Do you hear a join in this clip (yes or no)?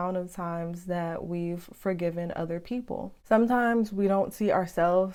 no